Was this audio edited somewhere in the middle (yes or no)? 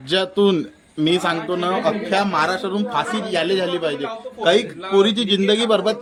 no